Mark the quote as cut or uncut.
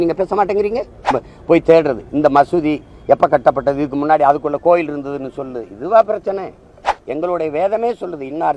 cut